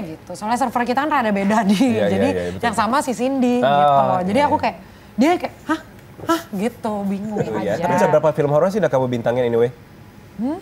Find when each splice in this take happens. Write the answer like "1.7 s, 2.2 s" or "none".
7.6 s